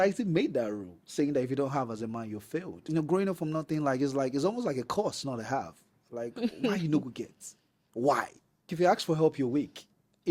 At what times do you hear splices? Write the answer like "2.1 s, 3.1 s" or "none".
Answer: 2.8 s, 8.7 s